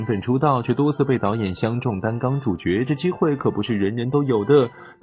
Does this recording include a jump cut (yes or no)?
no